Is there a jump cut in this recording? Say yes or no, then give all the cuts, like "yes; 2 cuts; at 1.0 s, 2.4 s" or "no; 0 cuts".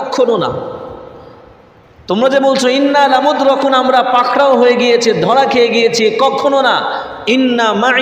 no; 0 cuts